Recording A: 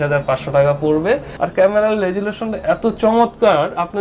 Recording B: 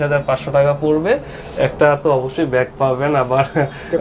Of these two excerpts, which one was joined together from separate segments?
A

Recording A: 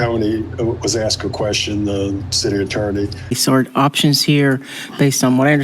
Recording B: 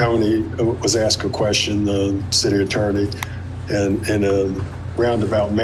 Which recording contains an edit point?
A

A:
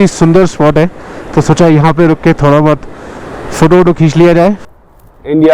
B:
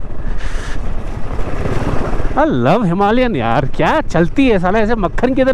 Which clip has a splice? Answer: A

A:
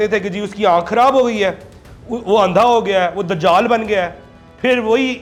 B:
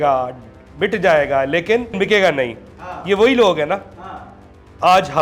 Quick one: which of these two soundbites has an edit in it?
B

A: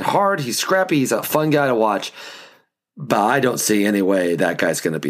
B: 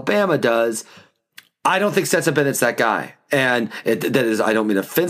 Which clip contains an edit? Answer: A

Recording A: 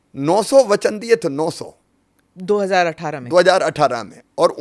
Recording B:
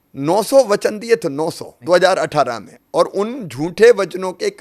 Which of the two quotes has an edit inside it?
B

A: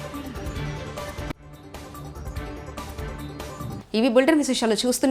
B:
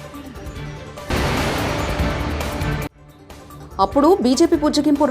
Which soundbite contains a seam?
B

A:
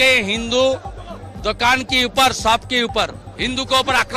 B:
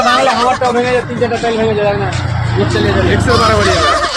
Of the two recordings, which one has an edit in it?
A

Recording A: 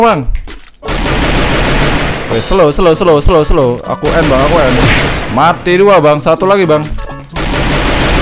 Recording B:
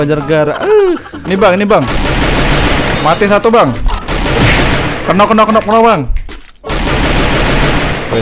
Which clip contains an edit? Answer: B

